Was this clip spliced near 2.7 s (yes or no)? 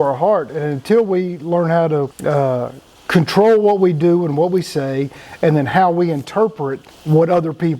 no